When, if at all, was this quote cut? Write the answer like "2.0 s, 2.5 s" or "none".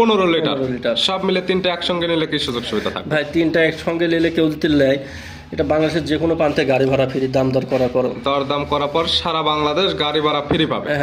none